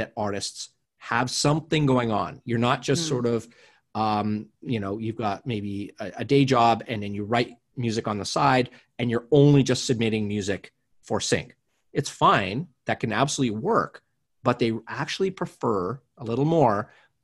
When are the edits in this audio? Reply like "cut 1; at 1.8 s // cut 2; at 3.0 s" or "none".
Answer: none